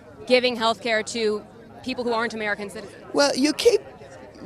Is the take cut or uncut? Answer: uncut